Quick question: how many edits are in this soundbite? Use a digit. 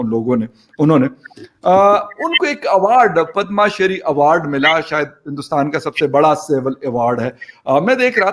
0